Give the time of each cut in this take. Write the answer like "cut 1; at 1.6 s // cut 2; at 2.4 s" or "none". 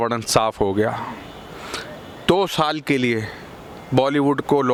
none